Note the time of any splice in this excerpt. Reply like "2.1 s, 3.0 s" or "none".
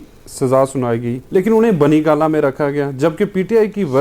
1.2 s